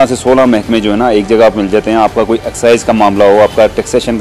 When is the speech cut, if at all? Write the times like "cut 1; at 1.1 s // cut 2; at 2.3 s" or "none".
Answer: none